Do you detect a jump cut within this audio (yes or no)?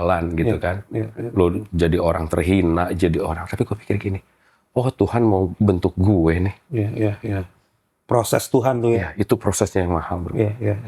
no